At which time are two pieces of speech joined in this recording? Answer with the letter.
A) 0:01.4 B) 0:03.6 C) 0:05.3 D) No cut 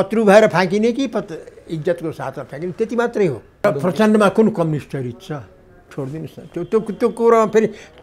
B